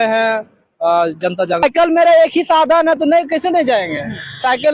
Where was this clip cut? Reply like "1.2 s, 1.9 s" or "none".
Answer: 1.6 s